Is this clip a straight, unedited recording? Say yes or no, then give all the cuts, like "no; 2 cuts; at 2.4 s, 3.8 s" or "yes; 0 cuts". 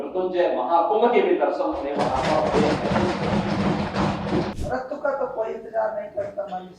no; 1 cut; at 4.5 s